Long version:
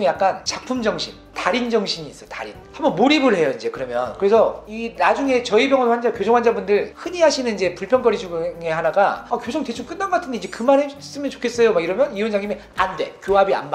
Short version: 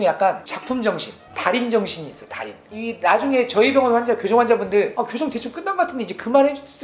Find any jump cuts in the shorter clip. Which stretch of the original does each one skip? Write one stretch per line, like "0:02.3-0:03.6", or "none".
0:02.7-0:04.6
0:06.9-0:09.3